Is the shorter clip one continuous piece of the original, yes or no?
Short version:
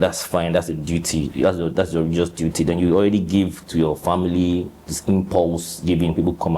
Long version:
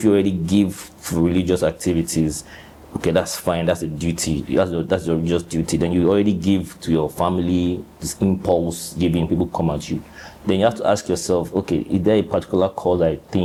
yes